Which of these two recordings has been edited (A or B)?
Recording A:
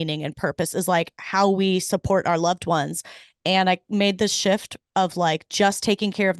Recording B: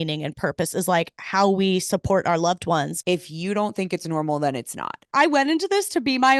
B